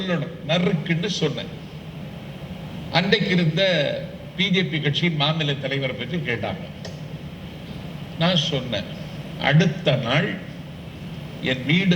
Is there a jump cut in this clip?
no; 0 cuts

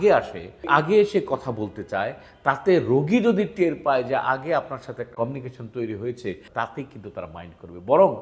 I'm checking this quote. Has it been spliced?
yes; 2 cuts; at 5.1 s, 6.4 s

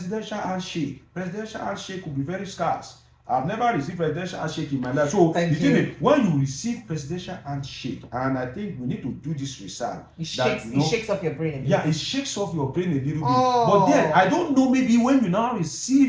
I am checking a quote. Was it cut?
no; 0 cuts

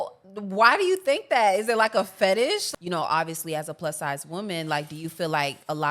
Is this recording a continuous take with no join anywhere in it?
no; 1 cut; at 2.6 s

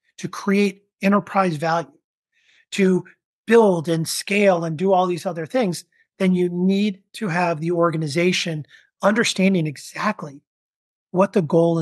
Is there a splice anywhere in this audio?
no; 0 cuts

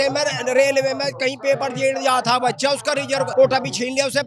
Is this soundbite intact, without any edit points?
no; 1 cut; at 3.3 s

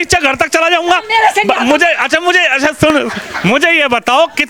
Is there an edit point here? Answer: no; 0 cuts

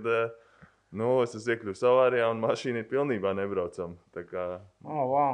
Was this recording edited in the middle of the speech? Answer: no; 0 cuts

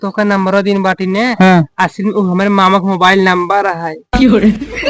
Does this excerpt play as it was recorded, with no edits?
no; 1 cut; at 3.9 s

